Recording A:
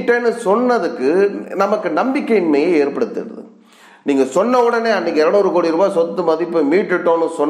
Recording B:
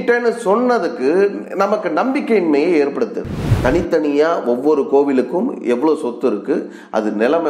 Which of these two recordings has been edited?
B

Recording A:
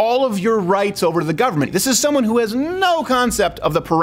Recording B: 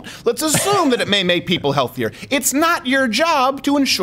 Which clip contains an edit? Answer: A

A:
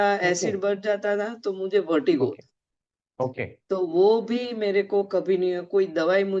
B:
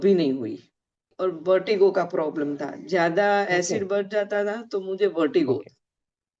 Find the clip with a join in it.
B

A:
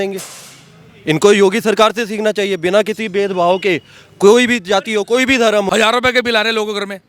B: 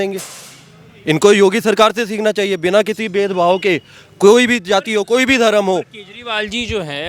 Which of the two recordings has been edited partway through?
A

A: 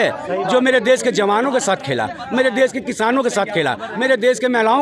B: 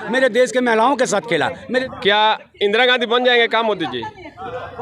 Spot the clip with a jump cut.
B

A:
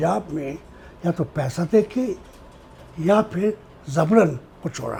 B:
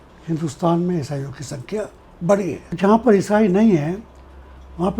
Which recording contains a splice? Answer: B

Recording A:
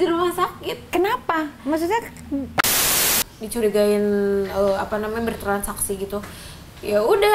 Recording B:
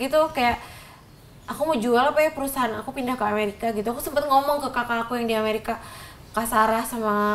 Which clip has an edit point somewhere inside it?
A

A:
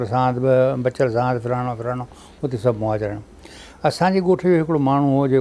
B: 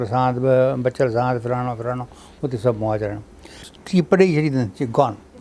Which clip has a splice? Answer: B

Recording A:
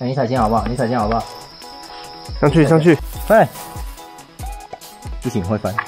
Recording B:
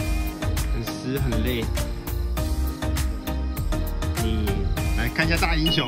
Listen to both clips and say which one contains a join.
A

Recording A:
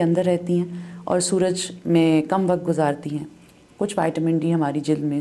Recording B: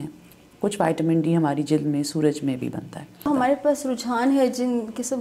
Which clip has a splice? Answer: B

